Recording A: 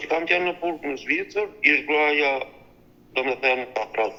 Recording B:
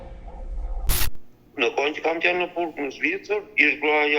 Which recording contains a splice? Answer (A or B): B